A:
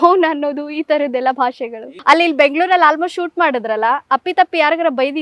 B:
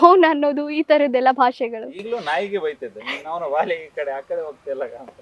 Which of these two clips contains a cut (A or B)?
A